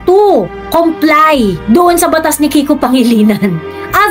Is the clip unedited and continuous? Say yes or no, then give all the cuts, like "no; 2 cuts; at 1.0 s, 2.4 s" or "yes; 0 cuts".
yes; 0 cuts